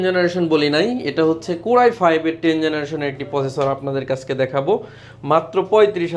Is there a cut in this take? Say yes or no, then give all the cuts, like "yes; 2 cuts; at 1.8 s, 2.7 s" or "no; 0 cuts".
no; 0 cuts